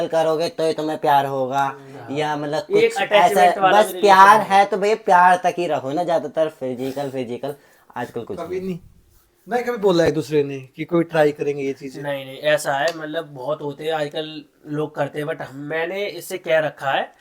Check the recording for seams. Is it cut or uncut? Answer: uncut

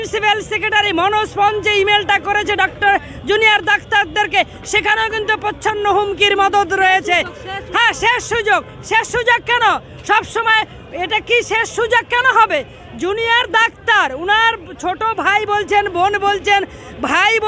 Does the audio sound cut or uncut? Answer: uncut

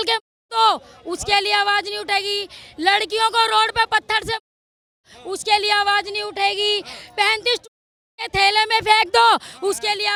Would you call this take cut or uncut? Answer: uncut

